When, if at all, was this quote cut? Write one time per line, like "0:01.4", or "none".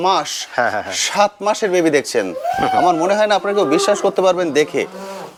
none